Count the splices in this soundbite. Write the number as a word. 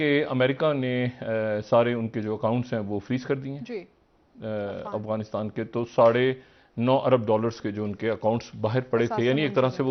zero